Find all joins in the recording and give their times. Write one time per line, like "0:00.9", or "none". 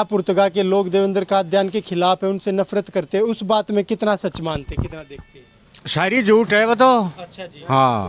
none